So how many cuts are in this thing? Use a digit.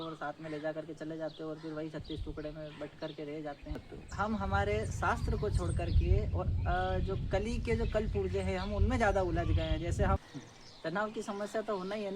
2